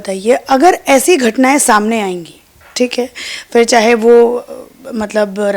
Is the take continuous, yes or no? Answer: yes